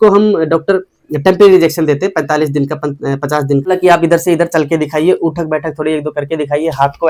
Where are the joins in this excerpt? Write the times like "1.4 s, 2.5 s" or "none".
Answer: 3.7 s